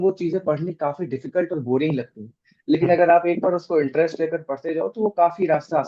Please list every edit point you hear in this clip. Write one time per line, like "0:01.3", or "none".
none